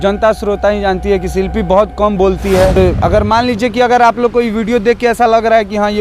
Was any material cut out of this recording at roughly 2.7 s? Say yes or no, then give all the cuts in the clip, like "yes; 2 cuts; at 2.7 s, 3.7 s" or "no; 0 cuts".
yes; 1 cut; at 2.7 s